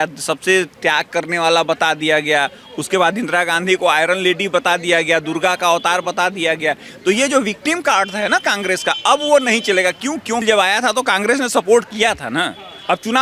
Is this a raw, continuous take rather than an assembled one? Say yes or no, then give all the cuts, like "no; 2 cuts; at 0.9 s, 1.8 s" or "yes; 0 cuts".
no; 1 cut; at 10.4 s